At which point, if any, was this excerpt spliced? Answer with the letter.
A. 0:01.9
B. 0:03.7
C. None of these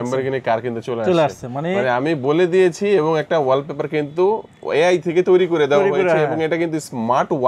C